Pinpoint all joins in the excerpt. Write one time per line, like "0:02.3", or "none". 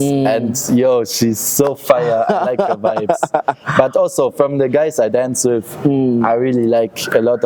none